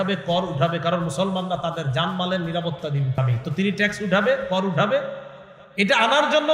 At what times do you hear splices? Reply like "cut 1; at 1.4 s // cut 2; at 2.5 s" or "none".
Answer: cut 1; at 3.2 s